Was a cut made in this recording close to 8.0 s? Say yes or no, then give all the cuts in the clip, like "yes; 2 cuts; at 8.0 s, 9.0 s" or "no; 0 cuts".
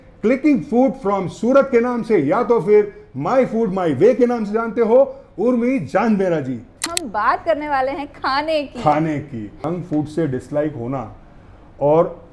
no; 2 cuts; at 6.8 s, 9.7 s